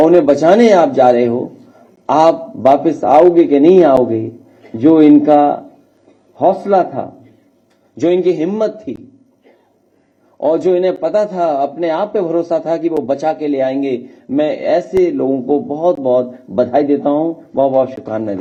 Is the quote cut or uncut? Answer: uncut